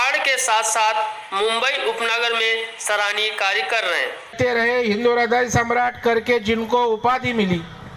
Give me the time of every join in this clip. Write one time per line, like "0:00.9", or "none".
0:04.3